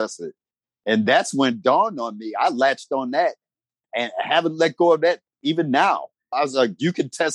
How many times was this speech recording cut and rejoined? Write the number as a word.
zero